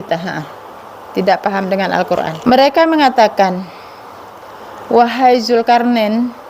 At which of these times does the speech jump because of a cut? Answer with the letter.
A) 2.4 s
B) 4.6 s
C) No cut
A